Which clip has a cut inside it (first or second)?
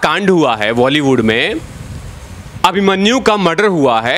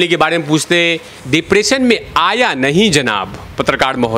second